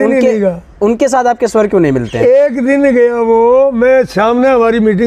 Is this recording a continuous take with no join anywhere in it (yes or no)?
yes